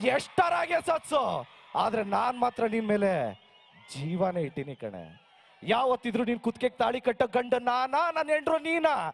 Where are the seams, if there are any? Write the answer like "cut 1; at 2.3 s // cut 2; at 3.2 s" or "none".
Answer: none